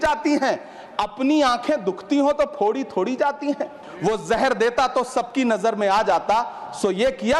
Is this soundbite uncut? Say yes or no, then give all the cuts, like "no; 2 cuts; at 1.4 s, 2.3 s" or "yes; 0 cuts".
no; 1 cut; at 3.8 s